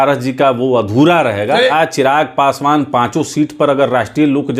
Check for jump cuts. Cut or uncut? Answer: cut